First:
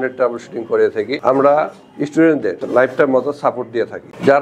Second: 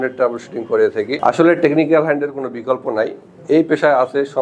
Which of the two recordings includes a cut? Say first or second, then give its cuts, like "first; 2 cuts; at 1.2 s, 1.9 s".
second; 1 cut; at 1.1 s